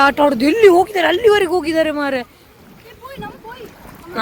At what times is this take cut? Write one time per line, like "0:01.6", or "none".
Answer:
none